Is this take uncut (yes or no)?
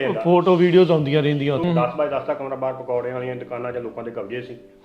no